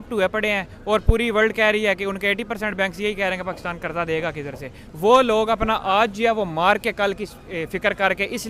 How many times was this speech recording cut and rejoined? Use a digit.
1